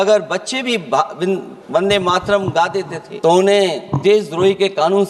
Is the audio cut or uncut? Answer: cut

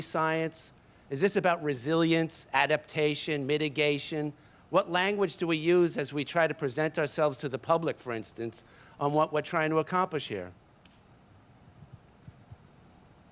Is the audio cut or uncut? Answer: cut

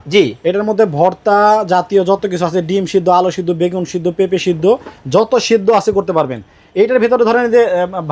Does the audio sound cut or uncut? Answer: uncut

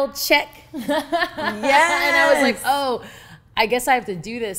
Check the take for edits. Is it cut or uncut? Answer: uncut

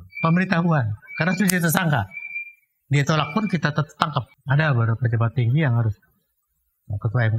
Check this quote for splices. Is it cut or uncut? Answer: cut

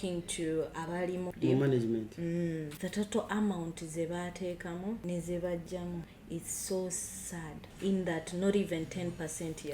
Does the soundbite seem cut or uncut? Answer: cut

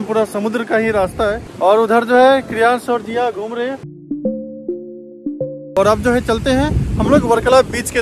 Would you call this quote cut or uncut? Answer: cut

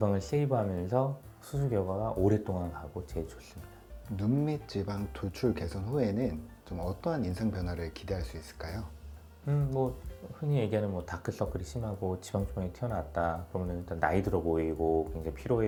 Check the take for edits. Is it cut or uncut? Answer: uncut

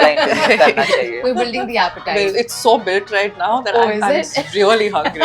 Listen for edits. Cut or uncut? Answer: cut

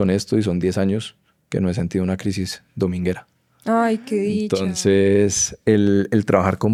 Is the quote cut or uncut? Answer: uncut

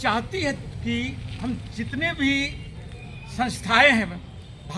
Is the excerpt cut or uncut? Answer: uncut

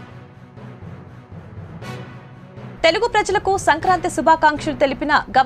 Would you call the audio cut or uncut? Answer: cut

